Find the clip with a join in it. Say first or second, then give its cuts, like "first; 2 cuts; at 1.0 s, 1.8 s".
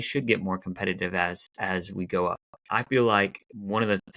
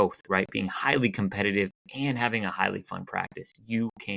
first; 1 cut; at 2.5 s